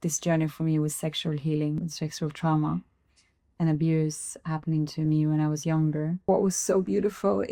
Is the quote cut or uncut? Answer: cut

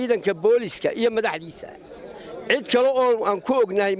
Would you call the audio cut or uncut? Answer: uncut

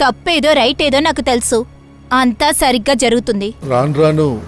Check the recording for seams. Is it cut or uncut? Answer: cut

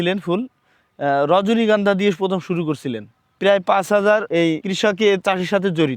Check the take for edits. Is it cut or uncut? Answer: cut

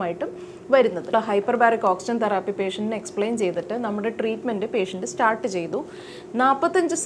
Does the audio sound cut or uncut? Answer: cut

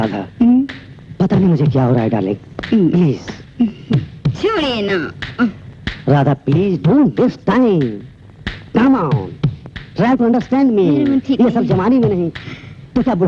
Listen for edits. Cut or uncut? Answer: uncut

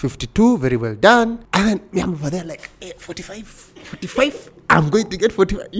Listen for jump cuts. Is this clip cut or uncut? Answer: uncut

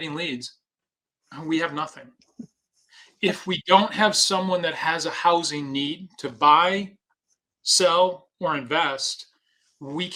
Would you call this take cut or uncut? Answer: uncut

